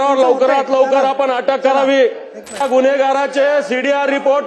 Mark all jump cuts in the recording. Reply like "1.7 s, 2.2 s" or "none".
2.6 s